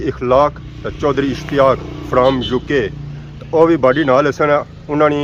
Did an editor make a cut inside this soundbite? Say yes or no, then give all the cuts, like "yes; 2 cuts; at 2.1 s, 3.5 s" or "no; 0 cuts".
no; 0 cuts